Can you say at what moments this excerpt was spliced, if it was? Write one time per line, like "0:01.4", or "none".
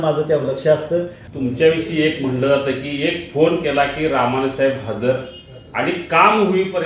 0:01.2